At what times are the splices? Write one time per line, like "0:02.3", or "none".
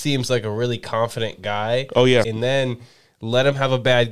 0:02.3